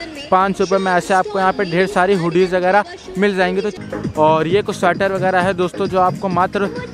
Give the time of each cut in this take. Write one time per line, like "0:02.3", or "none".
0:03.8